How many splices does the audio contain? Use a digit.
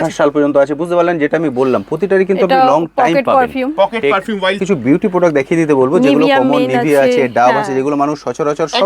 1